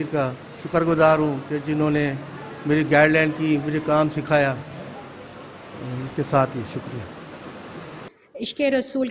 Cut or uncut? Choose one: cut